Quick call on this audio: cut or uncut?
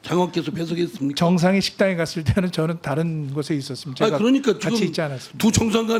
uncut